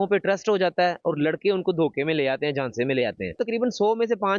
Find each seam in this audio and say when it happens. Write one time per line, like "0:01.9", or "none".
0:03.4